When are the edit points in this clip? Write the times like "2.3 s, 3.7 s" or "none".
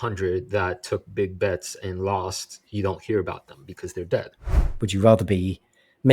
4.7 s